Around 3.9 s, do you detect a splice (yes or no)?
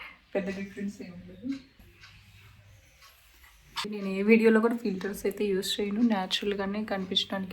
yes